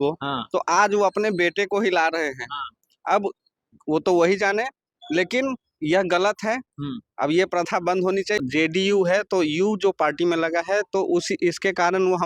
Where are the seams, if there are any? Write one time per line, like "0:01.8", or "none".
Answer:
0:08.4